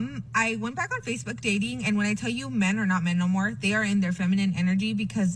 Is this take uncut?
yes; 0 cuts

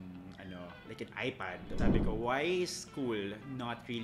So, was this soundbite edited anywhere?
yes; 1 cut; at 1.8 s

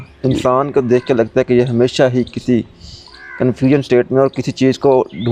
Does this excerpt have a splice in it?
no; 0 cuts

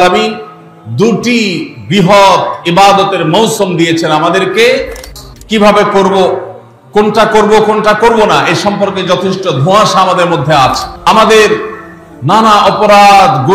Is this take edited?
yes; 2 cuts; at 5.0 s, 10.9 s

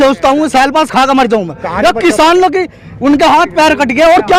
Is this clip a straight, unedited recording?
yes; 0 cuts

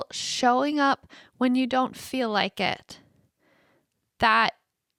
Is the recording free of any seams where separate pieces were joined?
yes; 0 cuts

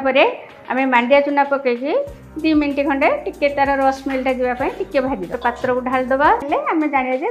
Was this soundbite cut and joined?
yes; 2 cuts; at 5.3 s, 6.4 s

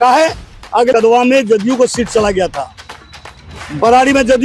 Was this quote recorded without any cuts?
no; 1 cut; at 0.9 s

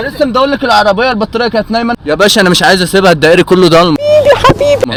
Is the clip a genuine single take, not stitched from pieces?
yes; 0 cuts

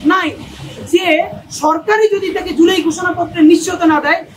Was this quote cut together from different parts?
no; 0 cuts

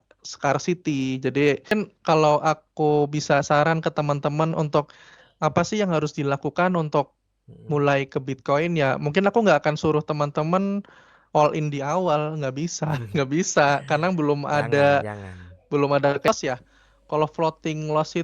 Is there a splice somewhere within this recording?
yes; 2 cuts; at 1.7 s, 16.3 s

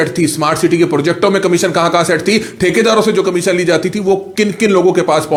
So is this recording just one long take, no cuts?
yes; 0 cuts

